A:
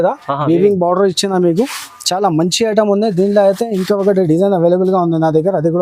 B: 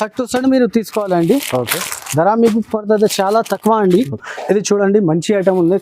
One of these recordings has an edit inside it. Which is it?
B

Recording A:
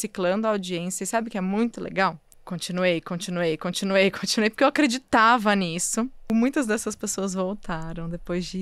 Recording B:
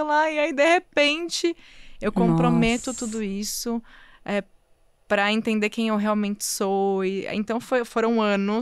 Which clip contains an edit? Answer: A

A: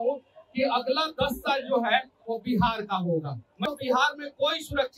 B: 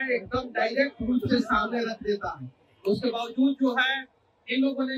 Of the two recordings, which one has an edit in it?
A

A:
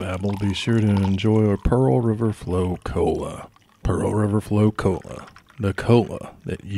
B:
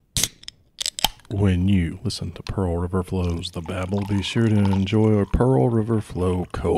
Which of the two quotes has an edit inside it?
B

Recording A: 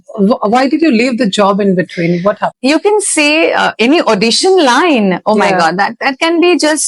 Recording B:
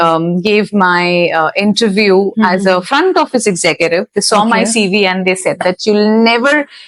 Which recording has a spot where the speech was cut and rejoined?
A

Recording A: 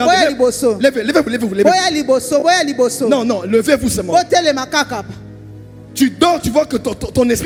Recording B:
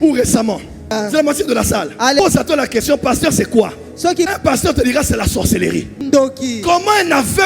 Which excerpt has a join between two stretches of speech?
B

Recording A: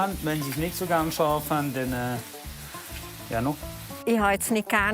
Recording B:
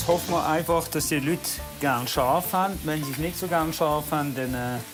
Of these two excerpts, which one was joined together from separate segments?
A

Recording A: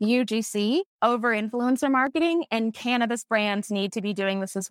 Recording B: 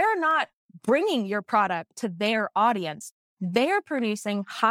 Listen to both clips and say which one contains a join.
A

